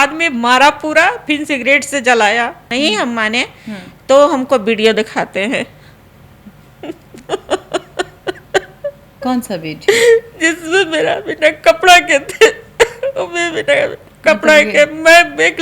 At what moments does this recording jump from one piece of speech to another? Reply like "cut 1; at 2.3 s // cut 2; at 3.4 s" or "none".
cut 1; at 2.7 s // cut 2; at 9.1 s